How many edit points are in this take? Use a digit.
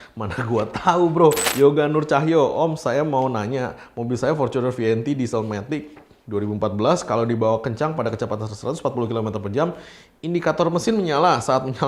1